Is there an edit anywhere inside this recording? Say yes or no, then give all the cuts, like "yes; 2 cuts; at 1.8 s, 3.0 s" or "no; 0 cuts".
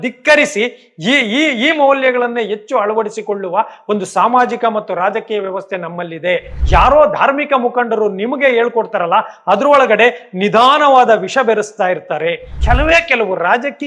yes; 2 cuts; at 6.5 s, 12.6 s